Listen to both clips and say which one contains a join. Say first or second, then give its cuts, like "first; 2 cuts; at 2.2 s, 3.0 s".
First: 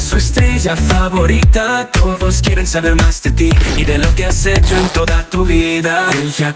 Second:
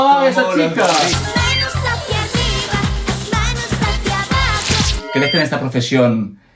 second; 1 cut; at 4.9 s